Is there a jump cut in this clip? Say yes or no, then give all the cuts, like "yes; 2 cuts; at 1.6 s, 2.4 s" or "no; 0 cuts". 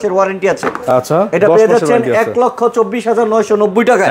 no; 0 cuts